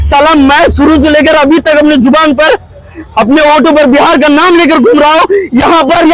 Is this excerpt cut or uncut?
uncut